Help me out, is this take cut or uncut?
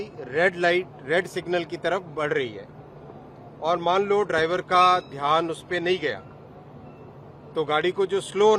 uncut